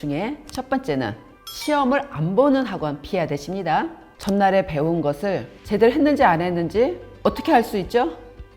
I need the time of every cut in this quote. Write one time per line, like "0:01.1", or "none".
0:04.0
0:05.5
0:07.1